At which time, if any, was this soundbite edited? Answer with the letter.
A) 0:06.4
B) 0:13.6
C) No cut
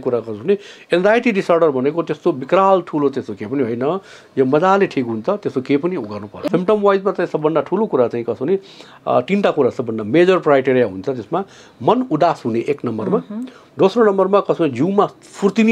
A